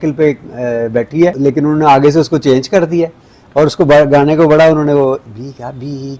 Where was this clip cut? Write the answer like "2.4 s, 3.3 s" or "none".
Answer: 1.4 s